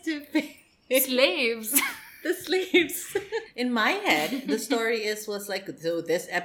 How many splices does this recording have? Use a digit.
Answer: 1